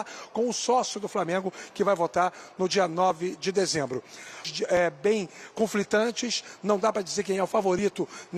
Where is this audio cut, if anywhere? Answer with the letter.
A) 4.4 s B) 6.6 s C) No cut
A